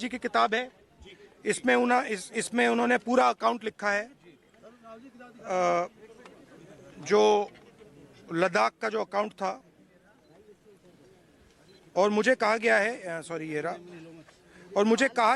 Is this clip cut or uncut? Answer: uncut